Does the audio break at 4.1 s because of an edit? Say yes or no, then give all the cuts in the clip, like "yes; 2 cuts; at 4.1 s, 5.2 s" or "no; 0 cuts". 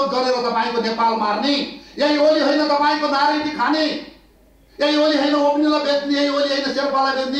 no; 0 cuts